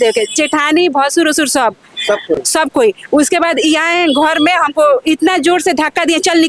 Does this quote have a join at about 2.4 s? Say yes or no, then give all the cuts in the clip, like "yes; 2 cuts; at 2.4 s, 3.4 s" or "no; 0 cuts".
no; 0 cuts